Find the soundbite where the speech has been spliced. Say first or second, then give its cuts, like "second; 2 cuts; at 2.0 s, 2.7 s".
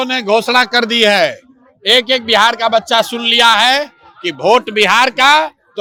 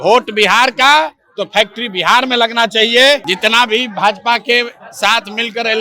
second; 1 cut; at 3.3 s